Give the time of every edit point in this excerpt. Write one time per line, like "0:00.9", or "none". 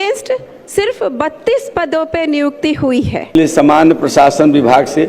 0:03.3